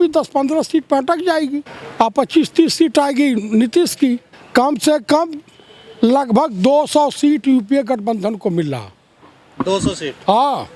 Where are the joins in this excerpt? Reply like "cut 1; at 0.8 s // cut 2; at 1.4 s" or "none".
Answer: cut 1; at 1.8 s // cut 2; at 4.3 s